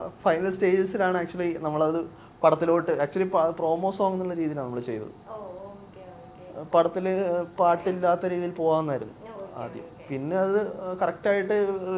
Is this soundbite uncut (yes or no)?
yes